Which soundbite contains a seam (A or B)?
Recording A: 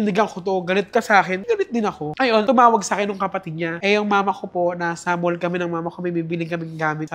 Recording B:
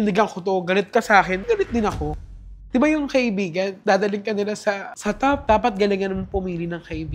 B